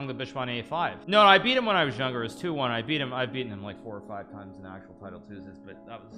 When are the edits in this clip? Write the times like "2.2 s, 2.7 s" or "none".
1.0 s